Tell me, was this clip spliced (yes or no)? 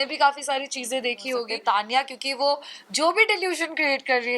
yes